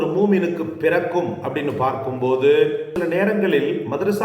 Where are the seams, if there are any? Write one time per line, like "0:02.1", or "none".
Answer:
0:02.9